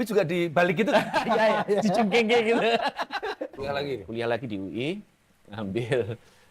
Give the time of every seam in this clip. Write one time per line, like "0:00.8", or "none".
0:03.5